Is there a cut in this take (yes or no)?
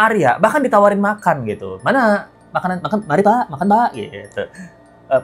no